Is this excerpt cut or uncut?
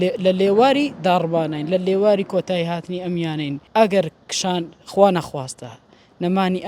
cut